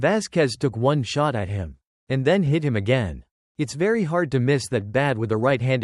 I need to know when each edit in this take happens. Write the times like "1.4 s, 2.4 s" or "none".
none